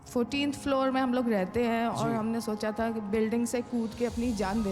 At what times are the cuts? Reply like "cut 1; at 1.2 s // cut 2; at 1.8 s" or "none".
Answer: none